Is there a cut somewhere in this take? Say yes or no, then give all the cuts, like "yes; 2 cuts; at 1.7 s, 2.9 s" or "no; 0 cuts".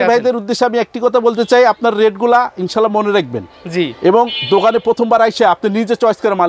no; 0 cuts